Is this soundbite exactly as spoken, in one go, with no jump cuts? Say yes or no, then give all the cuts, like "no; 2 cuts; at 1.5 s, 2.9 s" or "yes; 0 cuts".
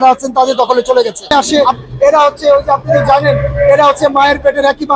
no; 1 cut; at 1.3 s